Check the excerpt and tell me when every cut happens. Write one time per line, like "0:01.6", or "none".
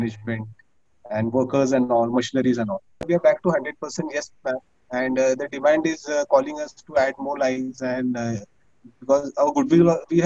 0:03.0